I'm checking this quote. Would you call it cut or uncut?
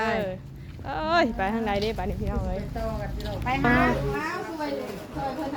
cut